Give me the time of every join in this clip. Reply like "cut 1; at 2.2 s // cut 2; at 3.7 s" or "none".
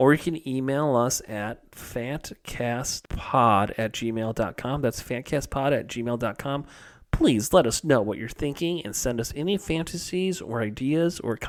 none